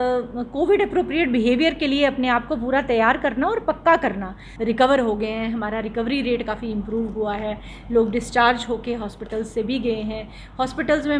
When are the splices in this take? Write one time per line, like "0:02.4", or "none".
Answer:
0:04.4